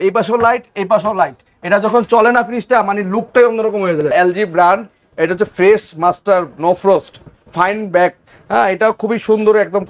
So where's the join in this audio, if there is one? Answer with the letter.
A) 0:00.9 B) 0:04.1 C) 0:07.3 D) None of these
B